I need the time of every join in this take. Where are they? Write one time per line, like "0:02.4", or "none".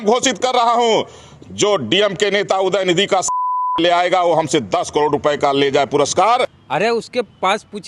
none